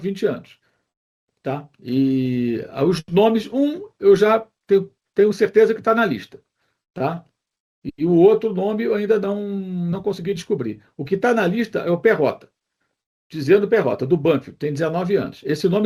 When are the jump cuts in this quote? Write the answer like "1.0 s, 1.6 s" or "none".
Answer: none